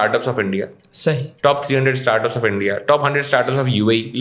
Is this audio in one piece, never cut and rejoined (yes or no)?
yes